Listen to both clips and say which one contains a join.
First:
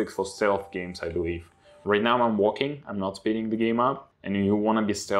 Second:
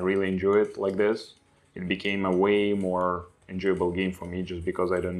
first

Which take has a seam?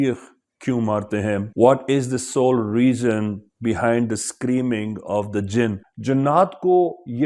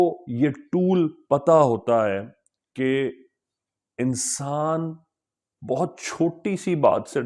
first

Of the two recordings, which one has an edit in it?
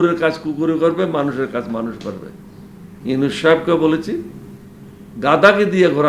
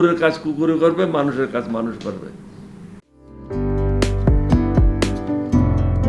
first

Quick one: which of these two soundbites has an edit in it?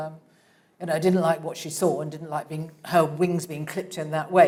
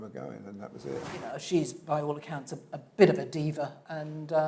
second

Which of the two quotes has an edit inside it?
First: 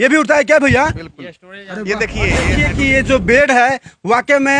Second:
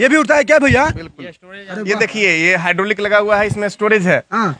first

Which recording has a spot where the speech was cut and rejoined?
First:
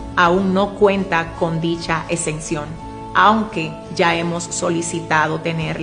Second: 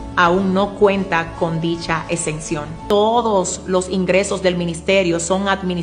second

